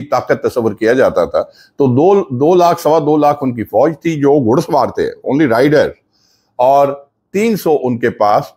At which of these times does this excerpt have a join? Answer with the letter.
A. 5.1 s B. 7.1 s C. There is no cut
C